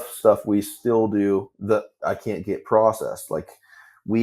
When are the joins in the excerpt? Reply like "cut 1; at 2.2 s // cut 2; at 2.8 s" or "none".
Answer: cut 1; at 1.5 s